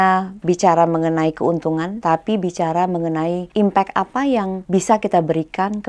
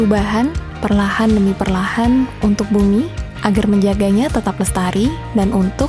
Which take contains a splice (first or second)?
first